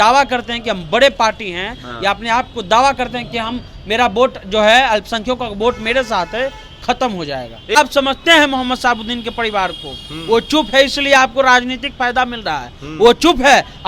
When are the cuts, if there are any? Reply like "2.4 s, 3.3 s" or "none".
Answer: 7.8 s